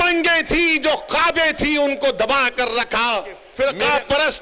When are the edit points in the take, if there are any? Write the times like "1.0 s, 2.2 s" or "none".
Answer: 3.5 s